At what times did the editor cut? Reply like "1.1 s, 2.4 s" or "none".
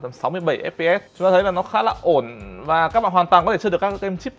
1.1 s